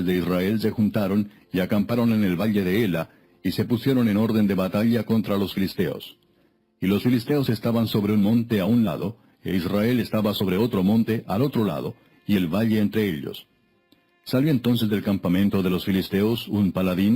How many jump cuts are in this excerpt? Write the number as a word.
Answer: one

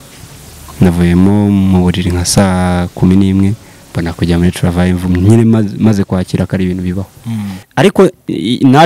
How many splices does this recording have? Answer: one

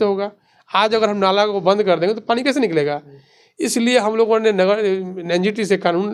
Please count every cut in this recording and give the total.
zero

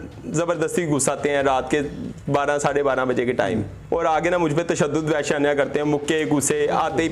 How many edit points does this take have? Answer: one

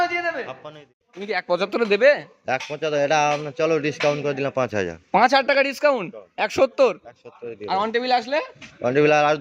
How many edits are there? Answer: one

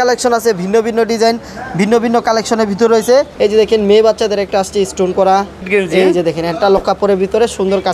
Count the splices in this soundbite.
two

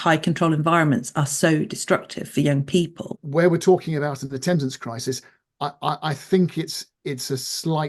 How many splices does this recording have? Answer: one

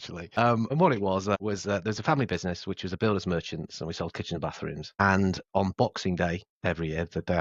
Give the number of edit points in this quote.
one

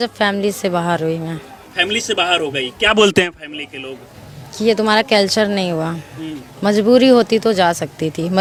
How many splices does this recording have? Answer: zero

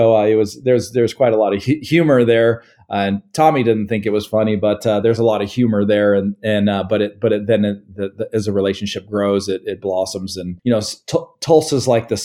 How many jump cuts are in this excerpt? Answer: zero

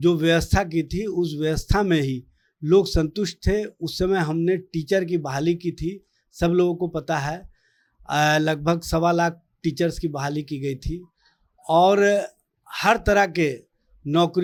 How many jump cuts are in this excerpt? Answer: zero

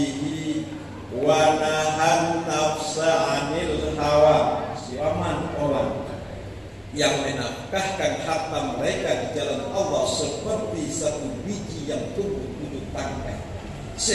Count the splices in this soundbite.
one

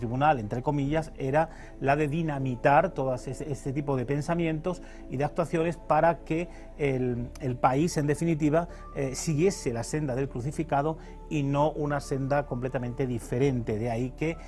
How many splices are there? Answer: zero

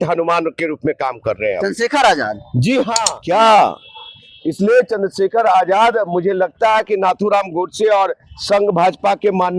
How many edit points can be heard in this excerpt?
one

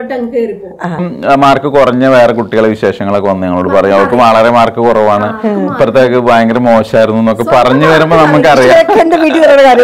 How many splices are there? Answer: one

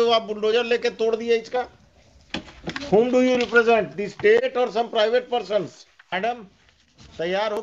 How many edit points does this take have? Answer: one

